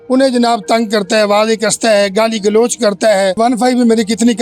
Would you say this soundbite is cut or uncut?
cut